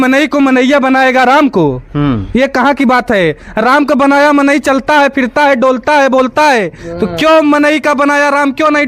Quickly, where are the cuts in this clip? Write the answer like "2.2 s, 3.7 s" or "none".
none